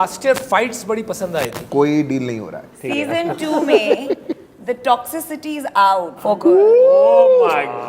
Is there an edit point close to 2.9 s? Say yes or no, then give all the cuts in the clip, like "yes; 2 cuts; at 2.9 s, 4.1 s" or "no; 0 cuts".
yes; 3 cuts; at 1.6 s, 2.9 s, 6.1 s